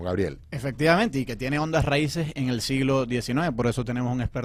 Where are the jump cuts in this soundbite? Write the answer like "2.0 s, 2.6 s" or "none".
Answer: none